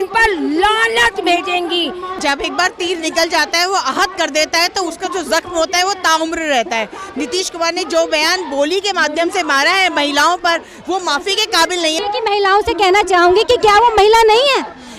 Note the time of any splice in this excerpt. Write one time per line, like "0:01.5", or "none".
0:02.2
0:12.0